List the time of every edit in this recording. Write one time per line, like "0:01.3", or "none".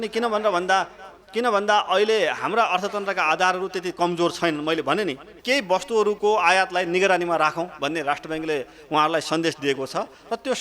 0:05.3